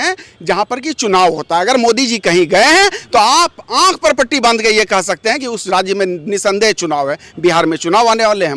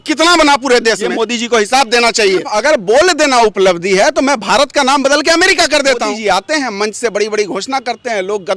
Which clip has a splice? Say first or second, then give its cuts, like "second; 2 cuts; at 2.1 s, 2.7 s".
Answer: second; 3 cuts; at 1.1 s, 2.5 s, 6.1 s